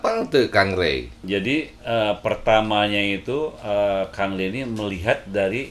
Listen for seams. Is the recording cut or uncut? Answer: cut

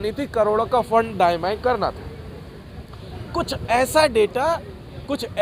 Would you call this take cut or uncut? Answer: uncut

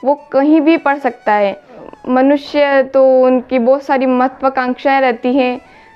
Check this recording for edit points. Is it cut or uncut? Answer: cut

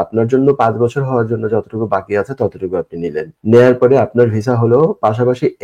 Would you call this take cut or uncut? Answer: cut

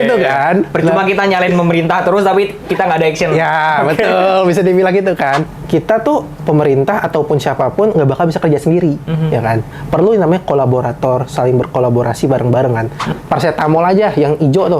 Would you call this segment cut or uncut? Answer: cut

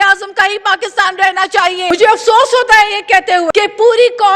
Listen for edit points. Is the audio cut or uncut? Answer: cut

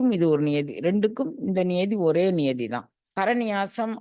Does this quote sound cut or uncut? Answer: cut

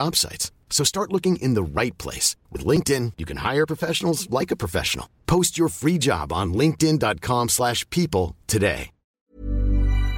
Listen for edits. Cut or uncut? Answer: cut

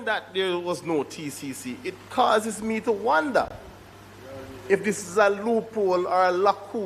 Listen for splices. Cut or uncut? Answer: uncut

